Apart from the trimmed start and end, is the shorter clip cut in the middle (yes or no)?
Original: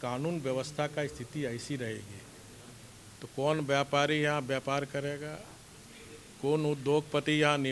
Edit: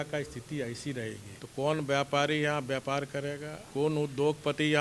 yes